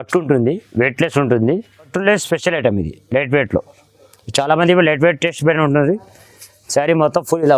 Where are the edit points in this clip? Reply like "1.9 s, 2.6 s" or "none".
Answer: 1.8 s